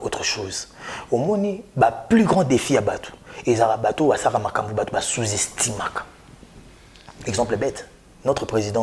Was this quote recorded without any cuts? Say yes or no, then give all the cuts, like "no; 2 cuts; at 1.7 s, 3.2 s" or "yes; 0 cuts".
yes; 0 cuts